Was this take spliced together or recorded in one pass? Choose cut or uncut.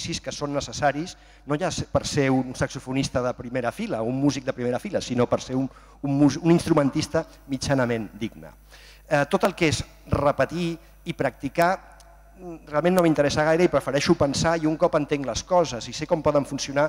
uncut